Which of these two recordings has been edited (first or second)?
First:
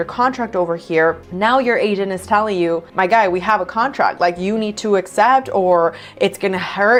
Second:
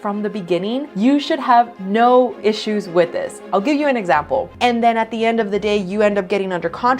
second